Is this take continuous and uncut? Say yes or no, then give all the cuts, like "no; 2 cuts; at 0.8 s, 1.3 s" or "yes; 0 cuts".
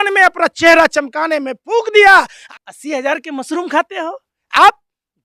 no; 1 cut; at 2.4 s